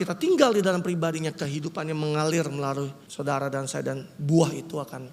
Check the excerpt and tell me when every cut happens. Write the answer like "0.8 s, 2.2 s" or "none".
3.0 s